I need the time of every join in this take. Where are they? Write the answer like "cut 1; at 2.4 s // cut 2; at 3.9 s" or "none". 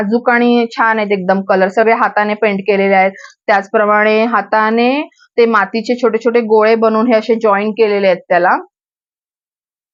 none